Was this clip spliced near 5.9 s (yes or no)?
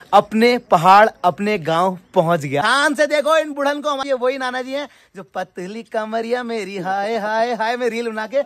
no